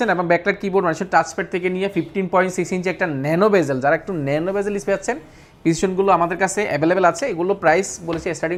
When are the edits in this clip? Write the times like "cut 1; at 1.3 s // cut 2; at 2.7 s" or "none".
none